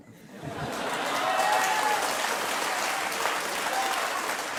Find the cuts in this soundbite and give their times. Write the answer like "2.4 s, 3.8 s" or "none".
none